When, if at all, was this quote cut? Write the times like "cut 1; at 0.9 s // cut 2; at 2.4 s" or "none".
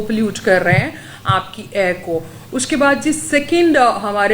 none